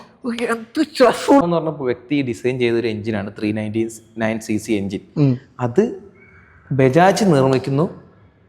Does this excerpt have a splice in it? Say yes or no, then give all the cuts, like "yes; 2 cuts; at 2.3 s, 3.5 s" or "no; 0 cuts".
yes; 1 cut; at 1.4 s